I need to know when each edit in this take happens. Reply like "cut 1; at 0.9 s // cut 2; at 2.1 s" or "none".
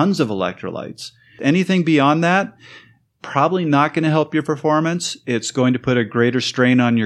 cut 1; at 1.4 s